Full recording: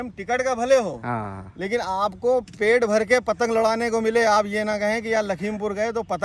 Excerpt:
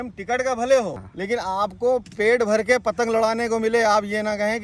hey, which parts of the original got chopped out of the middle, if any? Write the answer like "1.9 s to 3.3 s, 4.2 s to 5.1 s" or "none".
1.0 s to 1.4 s